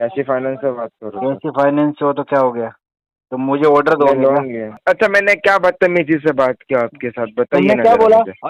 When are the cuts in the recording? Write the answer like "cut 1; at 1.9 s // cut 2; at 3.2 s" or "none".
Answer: cut 1; at 4.8 s